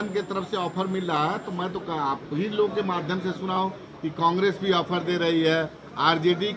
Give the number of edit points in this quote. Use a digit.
0